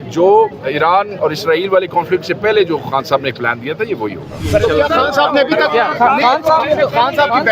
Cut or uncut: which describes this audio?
cut